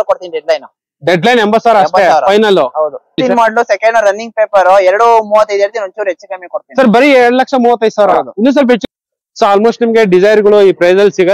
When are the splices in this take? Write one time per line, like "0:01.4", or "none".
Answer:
0:03.2
0:08.8